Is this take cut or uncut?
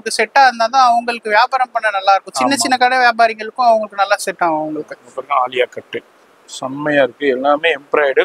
uncut